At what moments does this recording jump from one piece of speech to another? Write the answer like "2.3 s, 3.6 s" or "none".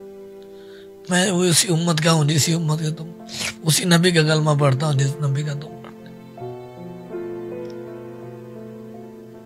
none

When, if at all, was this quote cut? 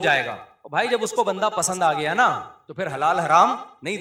none

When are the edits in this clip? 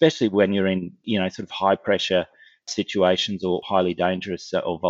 3.6 s

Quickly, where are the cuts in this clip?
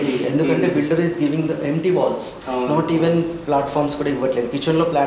none

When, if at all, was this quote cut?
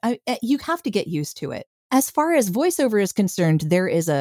1.8 s

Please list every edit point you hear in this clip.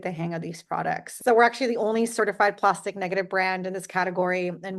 1.1 s

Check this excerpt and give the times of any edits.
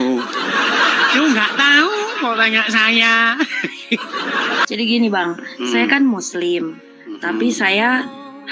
4.7 s

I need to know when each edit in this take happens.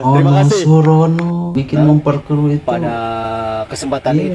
1.5 s

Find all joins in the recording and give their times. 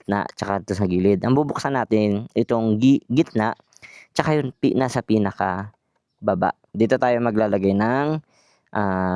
6.7 s

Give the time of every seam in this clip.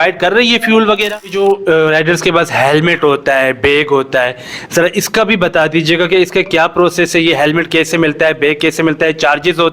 1.3 s

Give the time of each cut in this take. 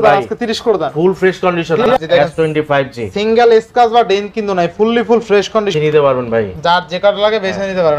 1.9 s, 5.7 s

